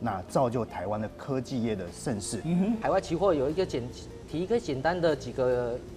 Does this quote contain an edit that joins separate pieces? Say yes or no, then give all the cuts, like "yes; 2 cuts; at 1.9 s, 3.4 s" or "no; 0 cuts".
yes; 1 cut; at 2.8 s